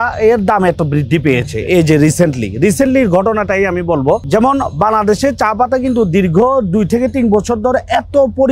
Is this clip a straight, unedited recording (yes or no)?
yes